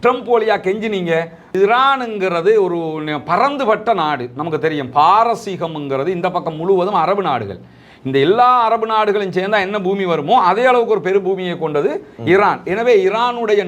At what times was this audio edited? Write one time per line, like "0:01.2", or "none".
0:01.5